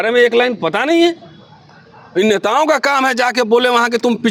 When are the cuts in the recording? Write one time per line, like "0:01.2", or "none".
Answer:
none